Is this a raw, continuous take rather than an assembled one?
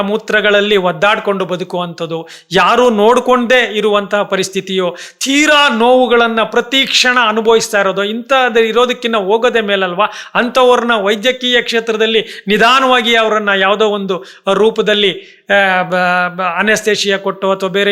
yes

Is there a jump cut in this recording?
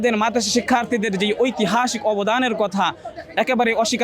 no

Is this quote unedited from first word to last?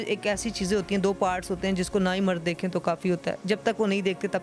yes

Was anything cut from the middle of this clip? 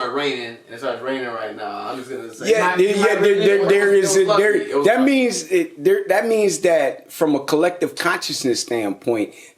no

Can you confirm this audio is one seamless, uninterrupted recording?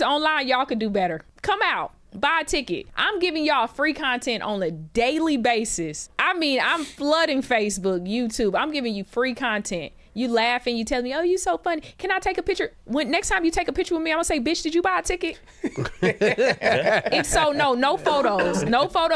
no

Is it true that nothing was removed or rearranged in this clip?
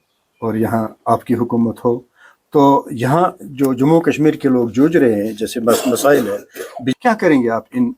no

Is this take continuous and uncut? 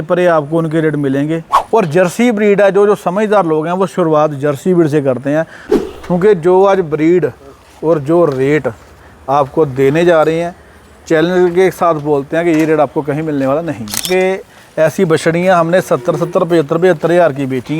no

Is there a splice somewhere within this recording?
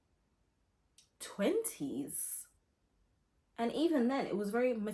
no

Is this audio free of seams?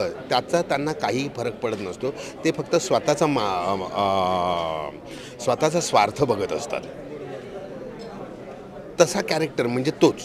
yes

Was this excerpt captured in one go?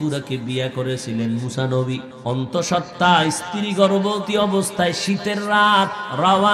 no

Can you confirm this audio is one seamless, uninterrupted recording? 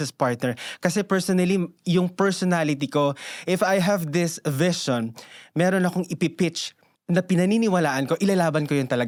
yes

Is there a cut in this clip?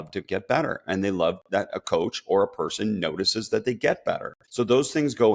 yes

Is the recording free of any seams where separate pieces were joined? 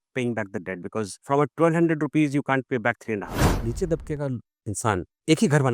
no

